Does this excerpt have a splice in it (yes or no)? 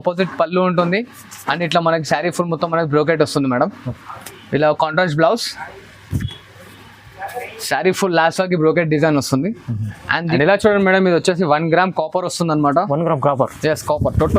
yes